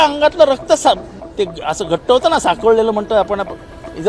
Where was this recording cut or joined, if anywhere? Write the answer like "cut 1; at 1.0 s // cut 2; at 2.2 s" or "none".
cut 1; at 1.2 s